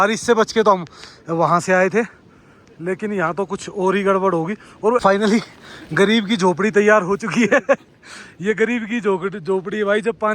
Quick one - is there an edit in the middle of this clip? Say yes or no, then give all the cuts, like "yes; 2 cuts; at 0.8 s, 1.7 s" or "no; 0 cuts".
yes; 1 cut; at 5.0 s